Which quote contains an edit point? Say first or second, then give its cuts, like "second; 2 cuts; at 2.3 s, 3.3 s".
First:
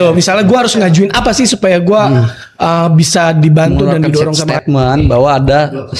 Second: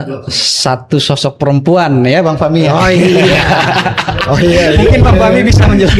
first; 1 cut; at 4.5 s